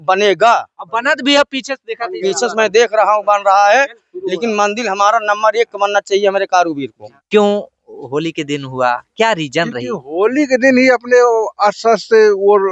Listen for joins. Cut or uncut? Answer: cut